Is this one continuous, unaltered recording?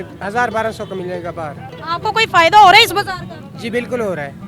yes; 0 cuts

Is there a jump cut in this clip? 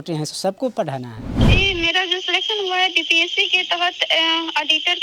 yes; 1 cut; at 1.5 s

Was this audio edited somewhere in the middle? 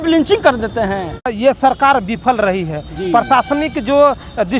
yes; 1 cut; at 1.3 s

